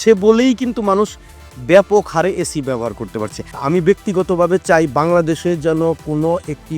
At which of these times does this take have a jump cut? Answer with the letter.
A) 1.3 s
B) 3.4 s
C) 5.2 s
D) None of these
B